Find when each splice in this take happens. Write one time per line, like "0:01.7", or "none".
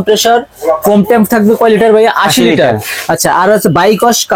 none